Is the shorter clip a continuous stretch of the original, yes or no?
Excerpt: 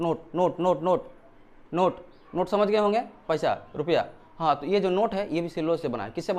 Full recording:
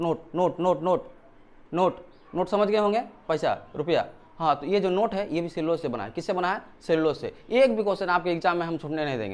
yes